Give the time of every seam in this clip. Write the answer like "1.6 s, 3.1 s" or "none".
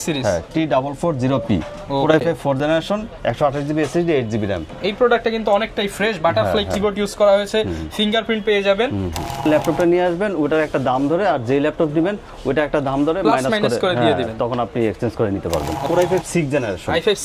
9.4 s, 15.9 s